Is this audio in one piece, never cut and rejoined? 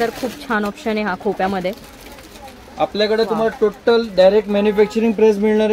yes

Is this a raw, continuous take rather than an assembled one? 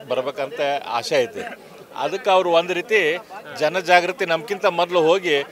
yes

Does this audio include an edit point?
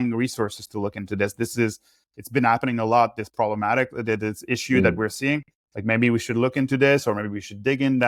no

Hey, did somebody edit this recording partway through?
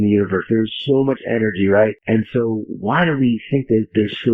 yes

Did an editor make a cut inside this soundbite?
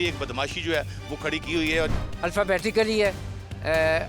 yes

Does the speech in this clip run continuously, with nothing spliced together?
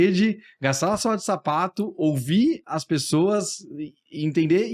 yes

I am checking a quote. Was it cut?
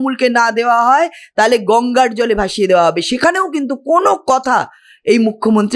no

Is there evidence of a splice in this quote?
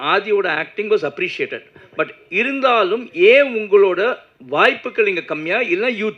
no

